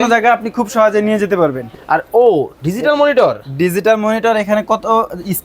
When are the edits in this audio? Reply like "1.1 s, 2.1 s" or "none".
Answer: 1.7 s